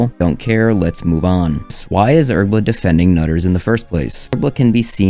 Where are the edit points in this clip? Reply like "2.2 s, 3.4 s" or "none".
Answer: 1.7 s, 4.2 s

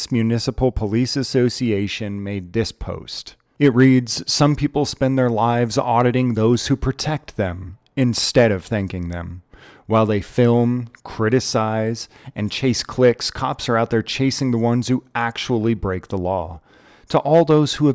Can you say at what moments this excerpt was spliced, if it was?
none

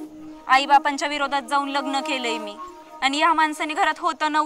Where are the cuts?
none

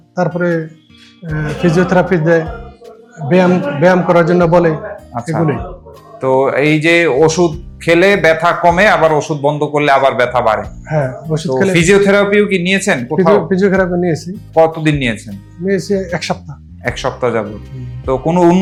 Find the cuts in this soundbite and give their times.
none

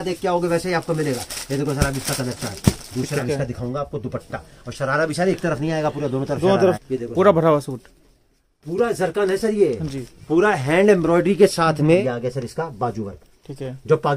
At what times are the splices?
3.2 s, 6.8 s, 12.0 s

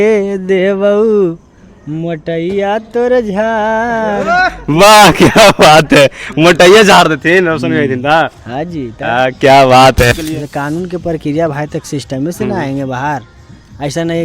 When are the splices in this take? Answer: 10.1 s

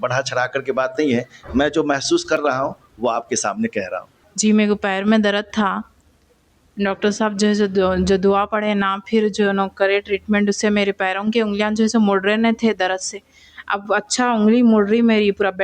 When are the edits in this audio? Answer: 4.2 s

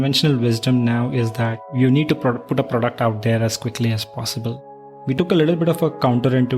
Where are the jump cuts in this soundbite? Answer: 1.7 s, 5.1 s

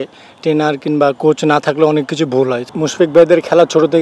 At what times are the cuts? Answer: 2.6 s

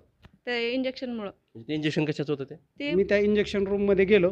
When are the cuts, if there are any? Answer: 2.9 s

